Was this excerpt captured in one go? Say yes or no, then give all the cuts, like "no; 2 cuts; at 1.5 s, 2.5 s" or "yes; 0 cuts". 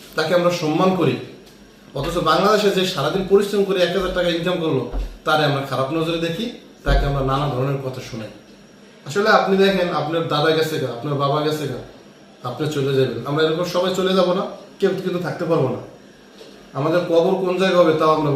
yes; 0 cuts